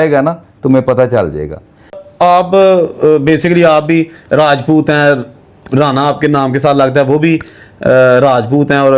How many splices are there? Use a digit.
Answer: 1